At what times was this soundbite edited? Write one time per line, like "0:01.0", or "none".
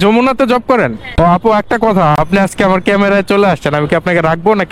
0:02.2